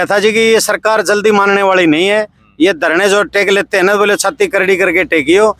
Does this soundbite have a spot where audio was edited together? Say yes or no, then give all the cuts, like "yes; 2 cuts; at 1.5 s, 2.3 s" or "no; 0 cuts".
no; 0 cuts